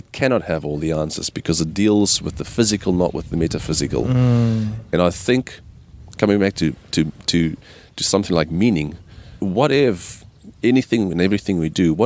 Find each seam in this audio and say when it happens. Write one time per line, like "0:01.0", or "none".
0:09.3